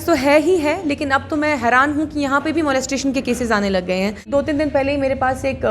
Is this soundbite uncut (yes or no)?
no